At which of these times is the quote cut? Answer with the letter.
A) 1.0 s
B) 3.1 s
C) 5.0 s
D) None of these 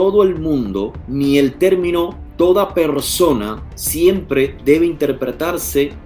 A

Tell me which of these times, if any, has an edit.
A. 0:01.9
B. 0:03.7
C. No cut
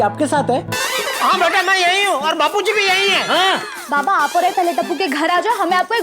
B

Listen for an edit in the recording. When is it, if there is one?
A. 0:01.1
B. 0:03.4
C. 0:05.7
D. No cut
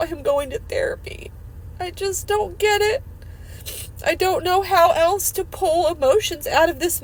D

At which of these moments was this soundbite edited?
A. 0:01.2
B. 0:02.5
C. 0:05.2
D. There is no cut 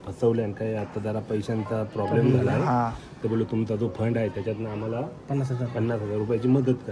D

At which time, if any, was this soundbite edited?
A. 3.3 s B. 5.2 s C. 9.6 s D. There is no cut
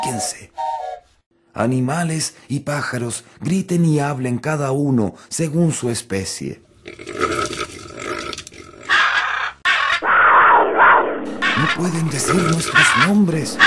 C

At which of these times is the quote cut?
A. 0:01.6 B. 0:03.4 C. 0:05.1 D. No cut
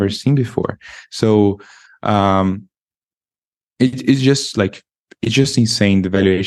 D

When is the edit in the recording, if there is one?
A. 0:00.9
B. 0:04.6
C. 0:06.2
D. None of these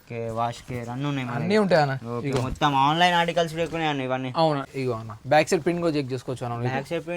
B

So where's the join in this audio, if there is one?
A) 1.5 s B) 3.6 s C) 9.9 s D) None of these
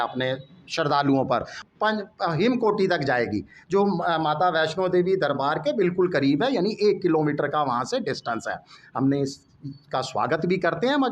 A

